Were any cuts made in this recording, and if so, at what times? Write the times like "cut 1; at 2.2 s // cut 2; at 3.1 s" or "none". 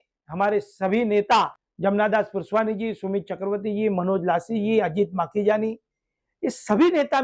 cut 1; at 1.6 s